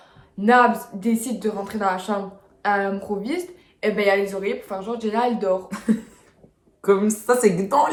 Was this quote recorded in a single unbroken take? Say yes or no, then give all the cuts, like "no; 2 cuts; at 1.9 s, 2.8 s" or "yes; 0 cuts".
yes; 0 cuts